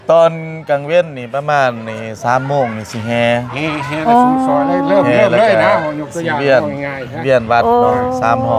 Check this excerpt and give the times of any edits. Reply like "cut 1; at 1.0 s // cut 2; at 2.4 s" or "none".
none

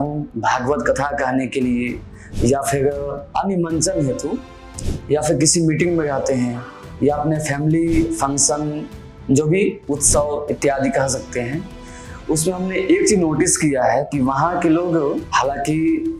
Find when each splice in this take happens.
cut 1; at 3.2 s // cut 2; at 15.2 s

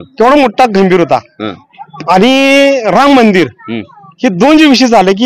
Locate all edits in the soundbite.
none

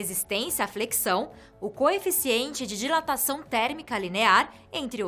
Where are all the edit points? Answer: cut 1; at 3.4 s

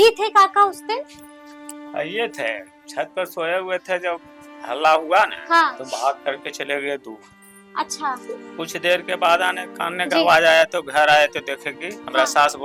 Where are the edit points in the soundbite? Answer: none

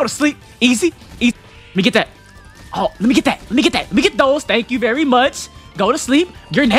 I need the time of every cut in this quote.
cut 1; at 1.3 s

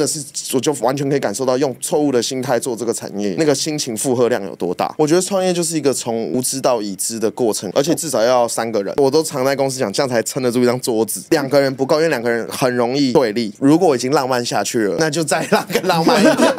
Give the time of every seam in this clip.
cut 1; at 4.9 s // cut 2; at 7.7 s // cut 3; at 8.9 s // cut 4; at 13.2 s

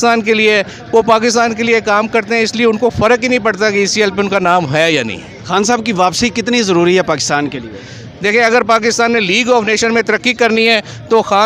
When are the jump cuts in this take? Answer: none

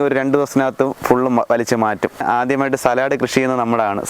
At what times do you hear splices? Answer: cut 1; at 2.2 s

